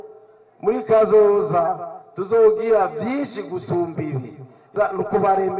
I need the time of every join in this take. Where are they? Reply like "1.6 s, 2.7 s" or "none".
4.7 s

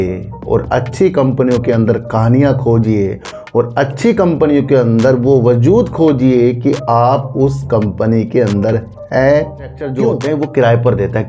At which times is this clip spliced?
9.9 s

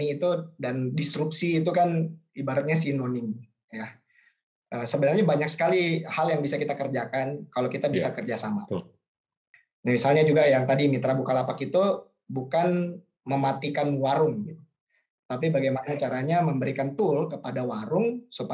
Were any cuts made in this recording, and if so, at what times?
4.0 s, 9.3 s

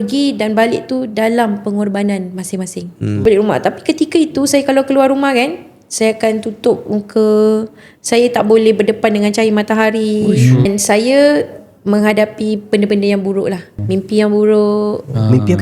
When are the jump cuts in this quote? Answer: 3.2 s, 10.7 s, 13.7 s

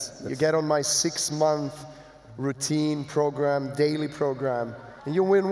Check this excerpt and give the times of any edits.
none

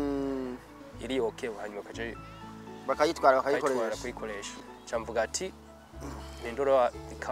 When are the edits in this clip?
4.6 s

